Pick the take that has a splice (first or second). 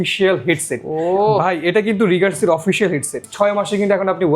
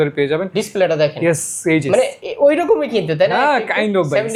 first